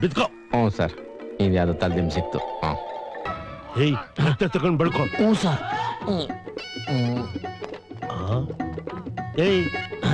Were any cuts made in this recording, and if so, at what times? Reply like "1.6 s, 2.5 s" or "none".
3.3 s

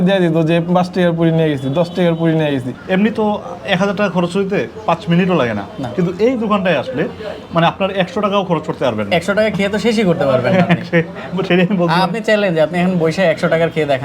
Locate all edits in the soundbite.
2.7 s

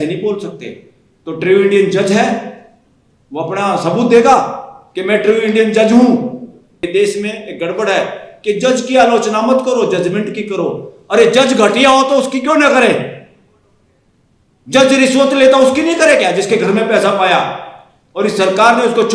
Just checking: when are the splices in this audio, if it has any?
6.9 s

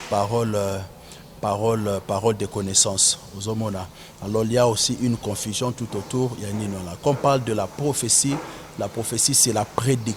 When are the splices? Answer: none

